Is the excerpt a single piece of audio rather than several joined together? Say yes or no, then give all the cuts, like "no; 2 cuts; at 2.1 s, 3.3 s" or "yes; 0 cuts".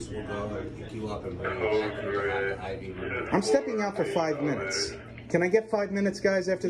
no; 1 cut; at 2.6 s